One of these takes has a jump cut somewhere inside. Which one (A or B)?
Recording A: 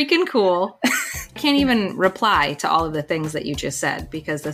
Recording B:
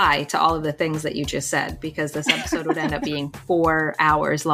A